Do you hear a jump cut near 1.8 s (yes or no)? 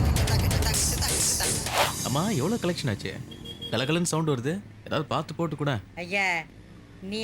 yes